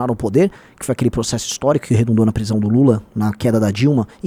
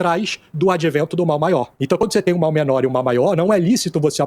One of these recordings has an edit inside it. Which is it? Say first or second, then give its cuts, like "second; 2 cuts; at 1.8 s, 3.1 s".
second; 1 cut; at 1.7 s